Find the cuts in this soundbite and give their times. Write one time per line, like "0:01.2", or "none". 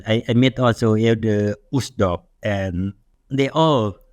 0:03.1